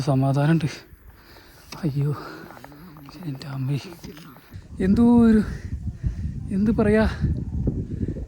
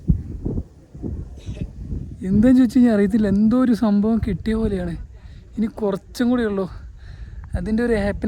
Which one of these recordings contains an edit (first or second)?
first